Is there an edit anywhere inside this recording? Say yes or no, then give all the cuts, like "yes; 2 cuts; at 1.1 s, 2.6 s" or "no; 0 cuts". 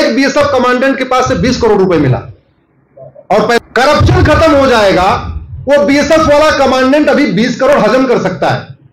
yes; 1 cut; at 3.6 s